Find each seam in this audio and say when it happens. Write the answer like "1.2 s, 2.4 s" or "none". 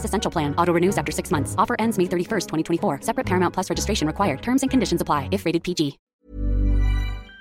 6.1 s